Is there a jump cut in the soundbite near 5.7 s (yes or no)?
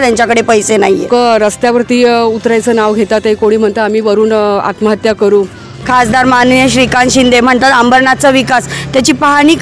yes